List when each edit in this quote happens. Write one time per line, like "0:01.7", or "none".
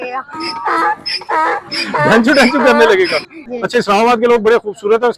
0:03.5